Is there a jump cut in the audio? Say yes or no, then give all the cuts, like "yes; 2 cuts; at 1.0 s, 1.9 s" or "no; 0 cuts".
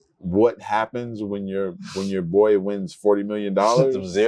no; 0 cuts